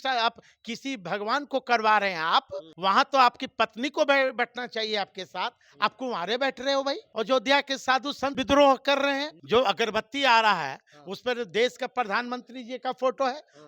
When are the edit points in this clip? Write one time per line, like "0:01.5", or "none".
0:02.7
0:07.1
0:08.4
0:09.3